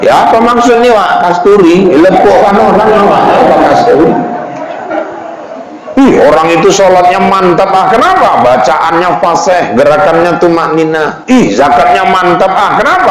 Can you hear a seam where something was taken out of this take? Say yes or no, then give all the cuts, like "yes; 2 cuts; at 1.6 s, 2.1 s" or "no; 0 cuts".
no; 0 cuts